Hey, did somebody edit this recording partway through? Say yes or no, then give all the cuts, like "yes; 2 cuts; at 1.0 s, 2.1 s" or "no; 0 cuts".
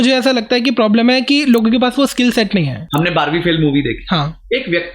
yes; 1 cut; at 2.8 s